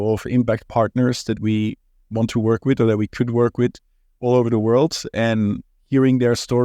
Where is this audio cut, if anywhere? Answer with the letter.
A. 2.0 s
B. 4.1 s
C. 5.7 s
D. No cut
C